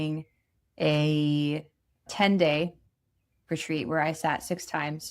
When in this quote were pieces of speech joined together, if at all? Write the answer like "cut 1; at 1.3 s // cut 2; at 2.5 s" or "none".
cut 1; at 2.1 s